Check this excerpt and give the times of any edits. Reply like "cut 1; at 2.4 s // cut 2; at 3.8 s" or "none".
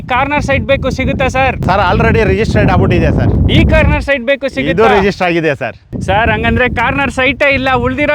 cut 1; at 1.6 s